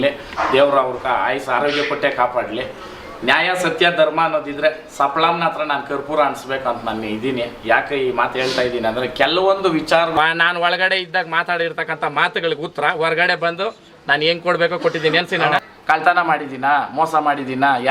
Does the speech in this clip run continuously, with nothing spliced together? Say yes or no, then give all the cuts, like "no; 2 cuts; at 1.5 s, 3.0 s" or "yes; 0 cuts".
no; 2 cuts; at 10.2 s, 15.7 s